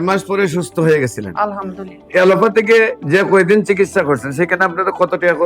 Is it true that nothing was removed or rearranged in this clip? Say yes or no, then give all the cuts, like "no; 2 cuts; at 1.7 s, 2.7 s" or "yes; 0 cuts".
no; 1 cut; at 2.0 s